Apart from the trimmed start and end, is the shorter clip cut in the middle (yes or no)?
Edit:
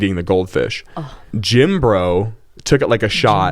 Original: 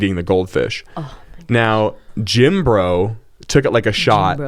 yes